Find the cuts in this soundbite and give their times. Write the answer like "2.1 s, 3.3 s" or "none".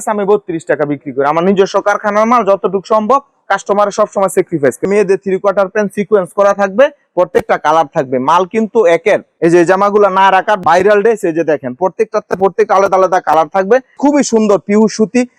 4.8 s, 9.3 s, 13.9 s